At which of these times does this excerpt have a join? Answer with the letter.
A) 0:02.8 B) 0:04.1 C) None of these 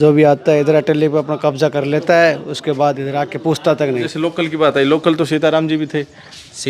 B